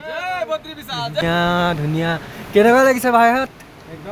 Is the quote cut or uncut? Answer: cut